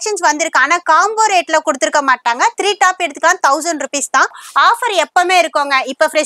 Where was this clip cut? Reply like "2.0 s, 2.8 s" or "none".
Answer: 4.4 s